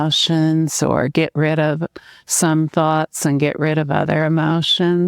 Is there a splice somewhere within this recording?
no; 0 cuts

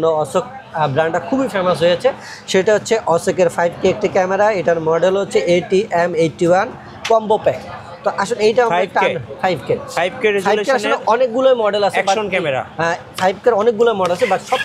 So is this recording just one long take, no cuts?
yes; 0 cuts

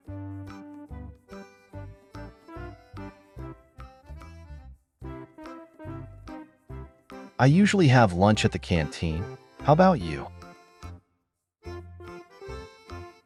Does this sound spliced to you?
no; 0 cuts

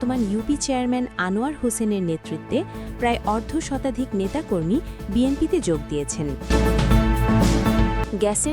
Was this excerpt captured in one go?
no; 1 cut; at 6.3 s

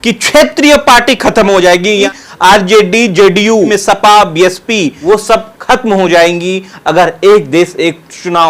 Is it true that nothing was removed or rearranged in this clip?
no; 3 cuts; at 2.1 s, 3.7 s, 4.9 s

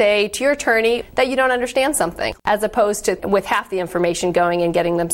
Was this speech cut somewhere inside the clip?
yes; 3 cuts; at 1.0 s, 2.3 s, 3.2 s

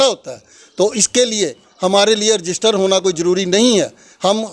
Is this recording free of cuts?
yes; 0 cuts

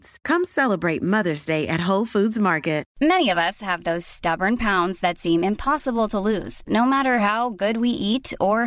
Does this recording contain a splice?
yes; 1 cut; at 2.9 s

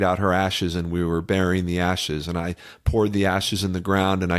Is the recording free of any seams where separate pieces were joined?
yes; 0 cuts

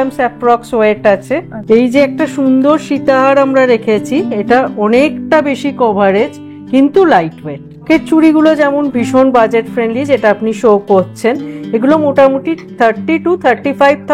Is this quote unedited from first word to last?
no; 2 cuts; at 1.5 s, 7.8 s

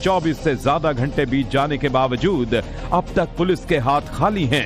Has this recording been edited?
no; 0 cuts

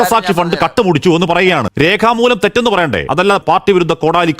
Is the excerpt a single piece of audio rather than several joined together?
no; 2 cuts; at 1.7 s, 3.3 s

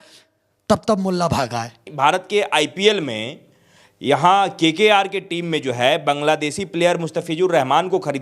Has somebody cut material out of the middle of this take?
yes; 1 cut; at 1.8 s

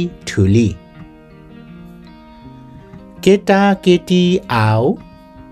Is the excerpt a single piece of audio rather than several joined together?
no; 2 cuts; at 0.8 s, 2.9 s

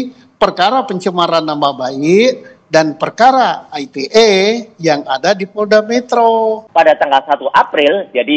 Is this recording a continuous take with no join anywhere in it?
no; 1 cut; at 6.6 s

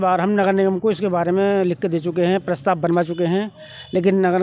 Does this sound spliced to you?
no; 0 cuts

